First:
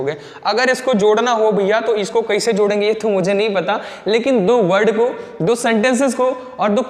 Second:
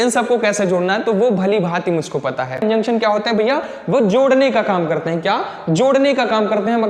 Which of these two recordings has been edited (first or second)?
second